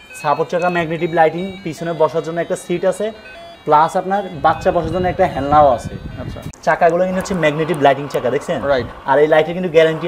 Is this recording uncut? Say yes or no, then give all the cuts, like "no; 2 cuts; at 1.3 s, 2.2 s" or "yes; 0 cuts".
no; 1 cut; at 6.5 s